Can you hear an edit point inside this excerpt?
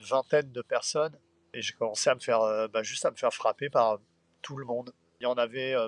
no; 0 cuts

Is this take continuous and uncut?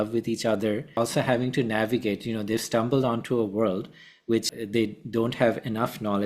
no; 2 cuts; at 1.0 s, 4.5 s

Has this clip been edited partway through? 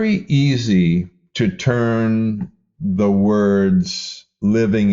yes; 1 cut; at 1.2 s

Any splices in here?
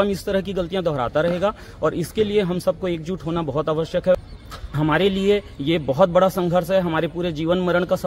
yes; 1 cut; at 4.2 s

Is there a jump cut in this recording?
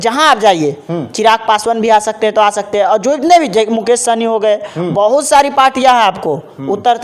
no; 0 cuts

